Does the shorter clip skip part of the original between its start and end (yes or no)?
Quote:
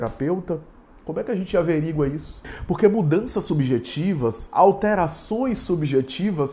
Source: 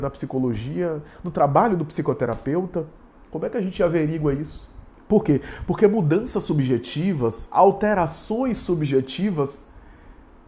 yes